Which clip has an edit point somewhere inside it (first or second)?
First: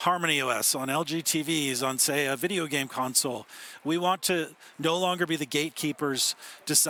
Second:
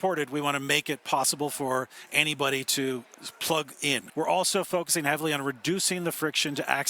second